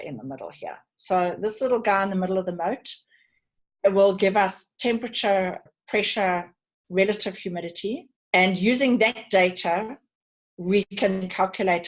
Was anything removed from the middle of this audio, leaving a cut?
yes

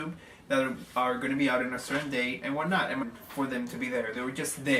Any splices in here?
no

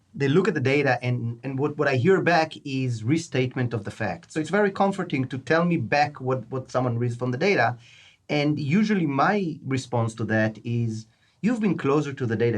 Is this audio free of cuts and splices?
no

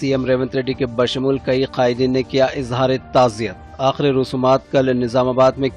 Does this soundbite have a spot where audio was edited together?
no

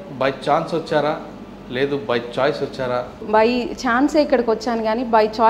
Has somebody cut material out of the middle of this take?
yes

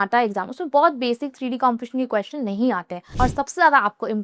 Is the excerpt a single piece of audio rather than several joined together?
no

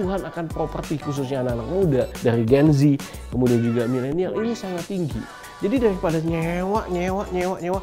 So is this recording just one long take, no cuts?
no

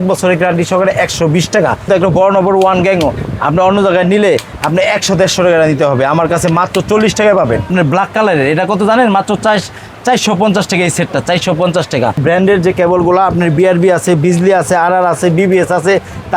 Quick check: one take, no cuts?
no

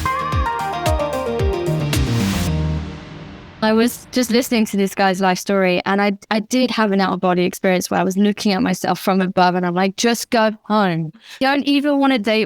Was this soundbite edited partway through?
yes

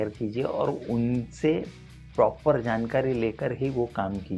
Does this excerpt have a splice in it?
no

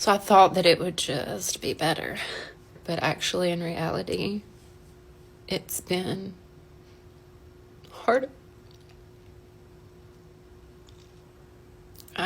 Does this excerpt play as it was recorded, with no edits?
no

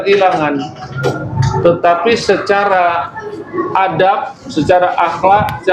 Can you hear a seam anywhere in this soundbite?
no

